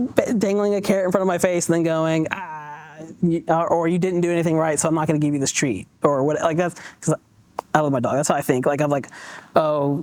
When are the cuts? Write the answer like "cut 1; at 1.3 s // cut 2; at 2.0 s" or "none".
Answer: none